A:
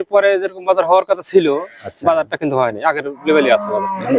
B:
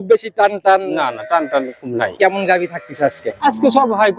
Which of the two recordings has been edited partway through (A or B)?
B